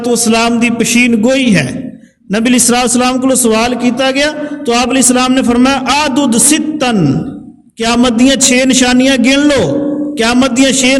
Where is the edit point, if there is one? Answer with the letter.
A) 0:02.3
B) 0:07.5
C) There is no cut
C